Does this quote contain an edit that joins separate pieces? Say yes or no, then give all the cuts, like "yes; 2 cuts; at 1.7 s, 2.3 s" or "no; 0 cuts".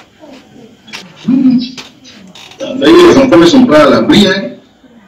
yes; 1 cut; at 1.0 s